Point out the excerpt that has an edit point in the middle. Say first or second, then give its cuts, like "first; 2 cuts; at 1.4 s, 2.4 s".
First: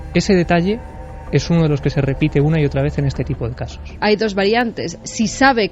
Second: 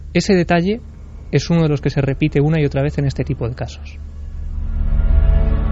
first; 1 cut; at 3.9 s